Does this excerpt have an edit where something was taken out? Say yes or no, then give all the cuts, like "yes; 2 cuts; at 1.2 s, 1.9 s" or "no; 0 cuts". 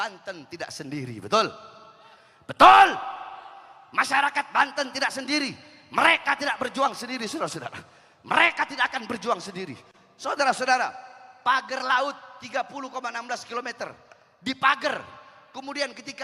no; 0 cuts